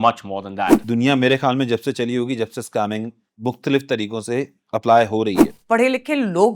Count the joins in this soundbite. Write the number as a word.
two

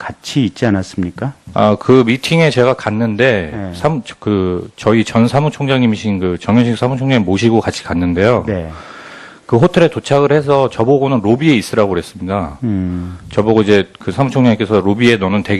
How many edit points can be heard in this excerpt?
one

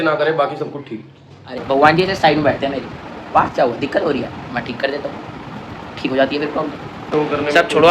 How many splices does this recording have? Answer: two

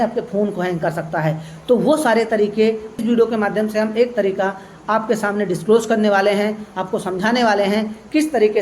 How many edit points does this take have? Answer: one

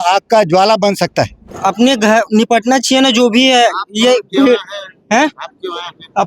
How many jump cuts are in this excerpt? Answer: one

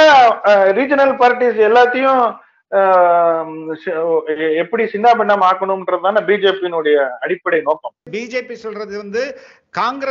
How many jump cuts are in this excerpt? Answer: one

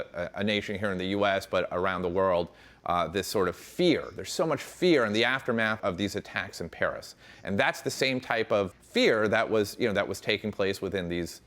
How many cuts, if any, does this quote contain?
two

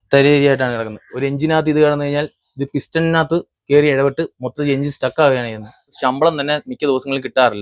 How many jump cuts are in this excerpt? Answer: one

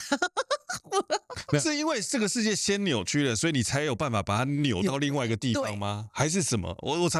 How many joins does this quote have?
zero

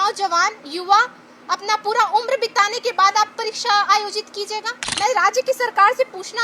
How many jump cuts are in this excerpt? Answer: one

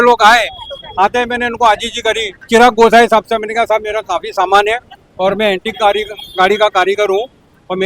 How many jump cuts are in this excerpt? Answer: one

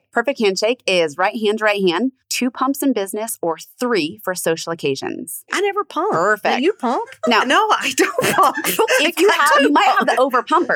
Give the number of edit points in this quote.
two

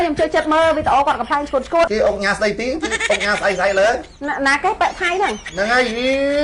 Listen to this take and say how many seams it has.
two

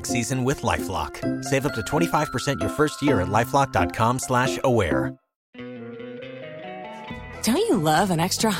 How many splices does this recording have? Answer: zero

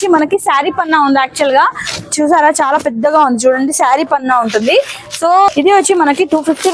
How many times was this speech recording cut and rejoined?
one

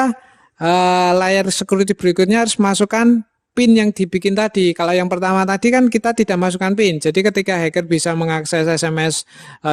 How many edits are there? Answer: zero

